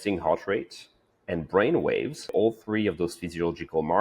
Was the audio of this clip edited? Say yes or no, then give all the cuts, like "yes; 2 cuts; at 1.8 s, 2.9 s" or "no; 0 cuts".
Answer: yes; 1 cut; at 2.3 s